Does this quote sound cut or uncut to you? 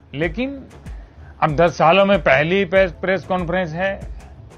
uncut